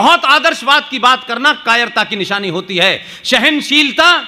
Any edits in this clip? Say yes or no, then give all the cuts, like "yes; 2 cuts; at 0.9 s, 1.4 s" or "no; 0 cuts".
no; 0 cuts